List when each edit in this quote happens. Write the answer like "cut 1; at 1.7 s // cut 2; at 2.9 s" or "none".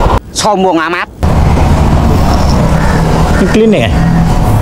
cut 1; at 1.2 s